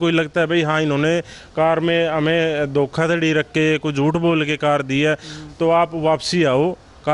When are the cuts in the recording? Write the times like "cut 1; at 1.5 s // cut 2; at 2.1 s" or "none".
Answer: none